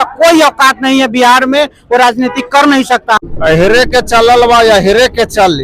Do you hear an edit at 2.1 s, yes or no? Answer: no